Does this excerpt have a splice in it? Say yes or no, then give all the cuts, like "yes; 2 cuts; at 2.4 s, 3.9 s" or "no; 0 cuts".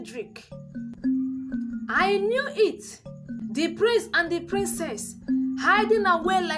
yes; 2 cuts; at 0.9 s, 3.3 s